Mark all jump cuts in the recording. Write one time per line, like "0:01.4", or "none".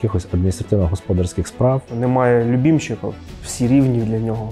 0:01.9